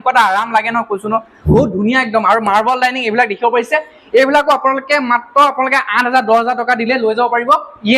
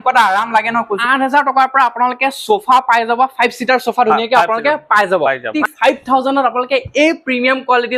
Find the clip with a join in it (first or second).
second